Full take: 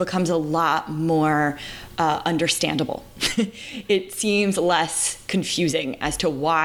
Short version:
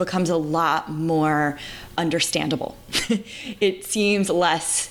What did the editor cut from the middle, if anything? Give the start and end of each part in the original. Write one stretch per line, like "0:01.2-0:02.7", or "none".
0:01.9-0:02.2